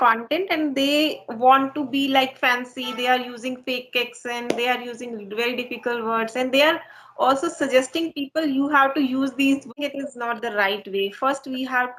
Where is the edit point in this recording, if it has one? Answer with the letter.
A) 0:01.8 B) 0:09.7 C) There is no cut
C